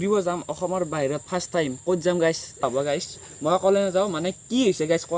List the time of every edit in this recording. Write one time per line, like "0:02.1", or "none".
0:02.6